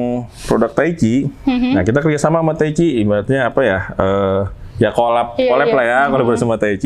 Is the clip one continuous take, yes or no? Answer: yes